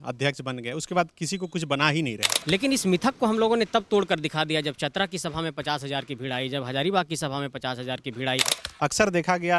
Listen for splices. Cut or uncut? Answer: cut